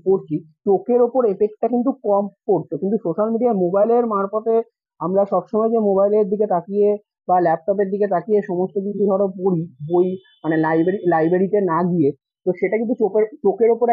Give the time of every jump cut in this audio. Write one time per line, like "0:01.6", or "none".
none